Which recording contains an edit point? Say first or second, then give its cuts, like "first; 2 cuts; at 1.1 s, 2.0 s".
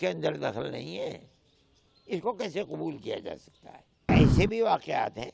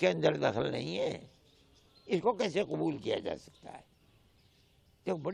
first; 1 cut; at 4.1 s